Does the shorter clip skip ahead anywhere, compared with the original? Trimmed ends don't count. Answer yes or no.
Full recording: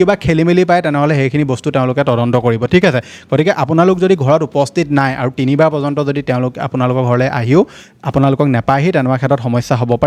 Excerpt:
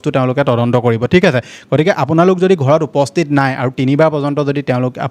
no